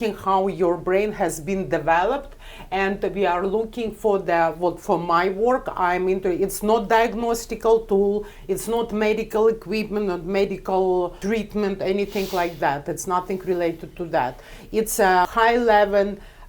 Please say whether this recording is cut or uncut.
cut